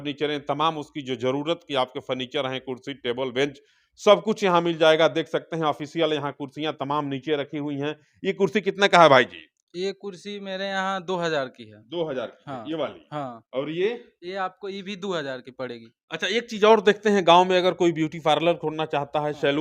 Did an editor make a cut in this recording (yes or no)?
no